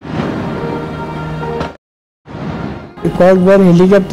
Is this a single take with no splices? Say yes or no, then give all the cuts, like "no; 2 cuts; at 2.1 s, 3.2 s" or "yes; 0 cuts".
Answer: no; 1 cut; at 2.9 s